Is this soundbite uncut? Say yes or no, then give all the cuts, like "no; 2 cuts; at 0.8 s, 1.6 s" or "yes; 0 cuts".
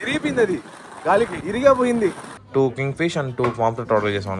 no; 2 cuts; at 1.4 s, 2.3 s